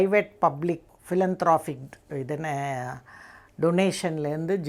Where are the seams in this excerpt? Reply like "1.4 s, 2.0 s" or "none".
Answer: 0.9 s